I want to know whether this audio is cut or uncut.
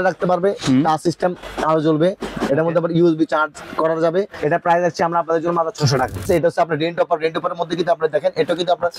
cut